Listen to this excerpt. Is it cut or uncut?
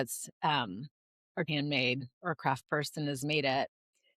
cut